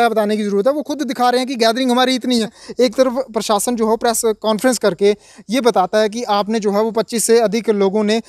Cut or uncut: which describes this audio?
cut